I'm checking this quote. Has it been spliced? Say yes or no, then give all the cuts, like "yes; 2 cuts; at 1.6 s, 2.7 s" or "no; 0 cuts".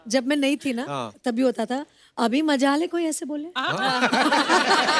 no; 0 cuts